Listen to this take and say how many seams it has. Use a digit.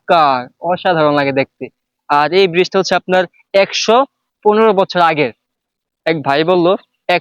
0